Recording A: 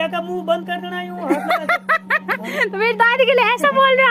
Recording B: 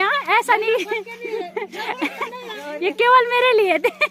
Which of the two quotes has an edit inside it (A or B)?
B